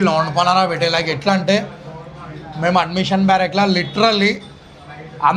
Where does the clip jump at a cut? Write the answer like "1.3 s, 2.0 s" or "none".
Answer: none